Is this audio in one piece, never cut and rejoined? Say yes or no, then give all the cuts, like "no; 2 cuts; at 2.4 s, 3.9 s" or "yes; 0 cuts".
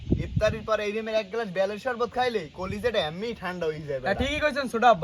yes; 0 cuts